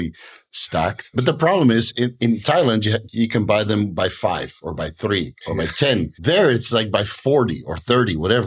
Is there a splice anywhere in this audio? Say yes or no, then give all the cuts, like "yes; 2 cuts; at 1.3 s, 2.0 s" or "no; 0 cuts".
yes; 2 cuts; at 1.0 s, 5.9 s